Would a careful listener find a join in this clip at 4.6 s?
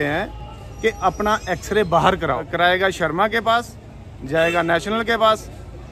no; 1 cut; at 2.5 s

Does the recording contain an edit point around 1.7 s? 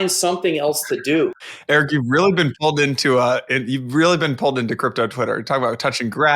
yes; 1 cut; at 1.7 s

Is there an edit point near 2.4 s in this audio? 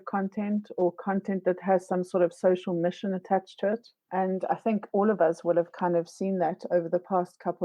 no; 1 cut; at 4.0 s

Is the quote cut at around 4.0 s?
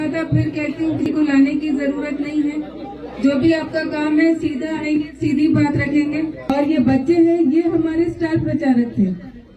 no; 2 cuts; at 1.0 s, 6.5 s

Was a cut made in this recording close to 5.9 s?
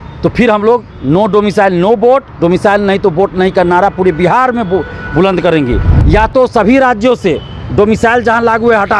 yes; 1 cut; at 5.9 s

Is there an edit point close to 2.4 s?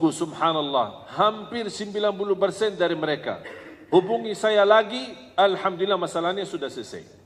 no; 0 cuts

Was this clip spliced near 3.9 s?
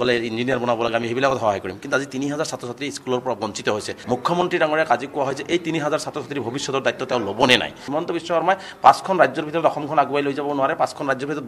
yes; 2 cuts; at 3.9 s, 7.8 s

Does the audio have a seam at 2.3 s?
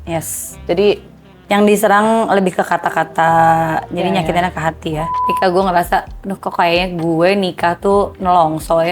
no; 1 cut; at 5.2 s

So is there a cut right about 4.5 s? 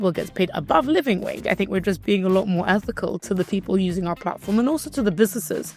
no; 1 cut; at 1.4 s

